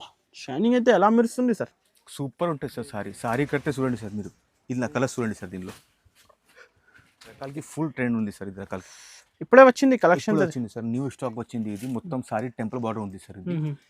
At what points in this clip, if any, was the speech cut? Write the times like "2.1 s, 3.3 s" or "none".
7.6 s